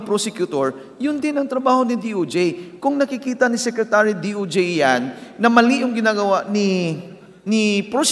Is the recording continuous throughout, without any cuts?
yes; 0 cuts

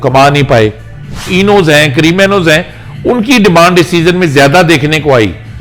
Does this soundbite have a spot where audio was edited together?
yes; 1 cut; at 1.3 s

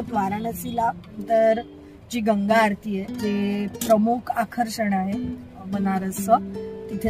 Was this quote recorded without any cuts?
no; 1 cut; at 1.2 s

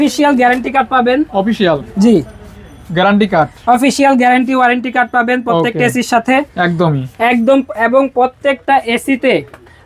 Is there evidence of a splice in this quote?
no; 0 cuts

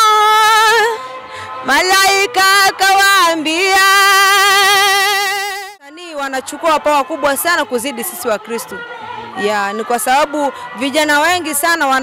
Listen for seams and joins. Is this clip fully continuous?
no; 1 cut; at 5.8 s

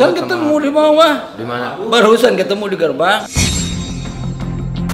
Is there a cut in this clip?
no; 0 cuts

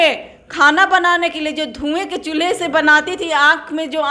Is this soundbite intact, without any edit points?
yes; 0 cuts

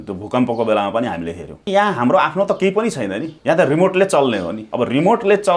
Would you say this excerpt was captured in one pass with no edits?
no; 3 cuts; at 1.7 s, 3.3 s, 4.6 s

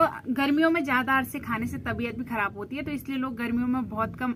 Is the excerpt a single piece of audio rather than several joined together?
yes; 0 cuts

